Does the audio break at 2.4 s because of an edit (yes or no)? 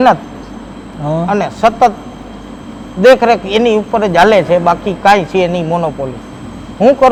no